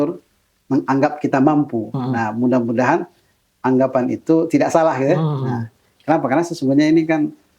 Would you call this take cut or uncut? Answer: uncut